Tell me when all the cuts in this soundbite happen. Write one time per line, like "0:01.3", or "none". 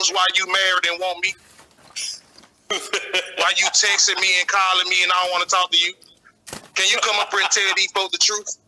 none